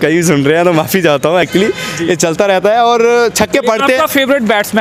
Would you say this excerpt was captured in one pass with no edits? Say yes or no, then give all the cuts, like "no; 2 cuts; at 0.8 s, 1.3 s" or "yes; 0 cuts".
yes; 0 cuts